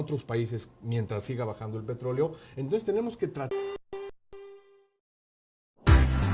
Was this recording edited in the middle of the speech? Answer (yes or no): no